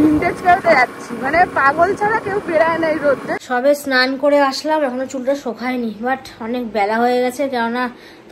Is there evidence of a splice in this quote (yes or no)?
yes